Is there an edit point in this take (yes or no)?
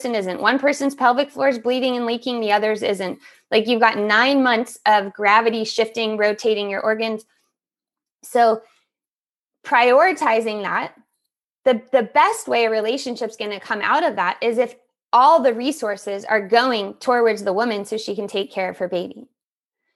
no